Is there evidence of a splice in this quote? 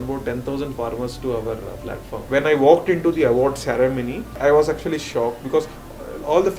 yes; 2 cuts; at 2.2 s, 4.2 s

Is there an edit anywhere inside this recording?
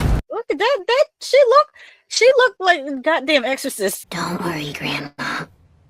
yes; 2 cuts; at 4.0 s, 5.1 s

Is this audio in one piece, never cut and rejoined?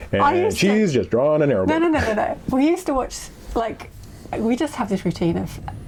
yes; 0 cuts

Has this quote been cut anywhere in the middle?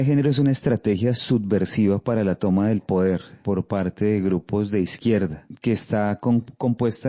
yes; 2 cuts; at 3.3 s, 5.5 s

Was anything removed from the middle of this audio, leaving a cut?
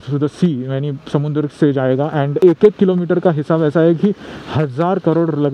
no; 0 cuts

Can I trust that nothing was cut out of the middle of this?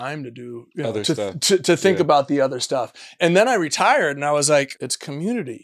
no; 1 cut; at 4.7 s

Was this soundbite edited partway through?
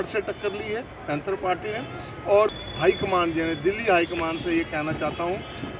yes; 1 cut; at 2.5 s

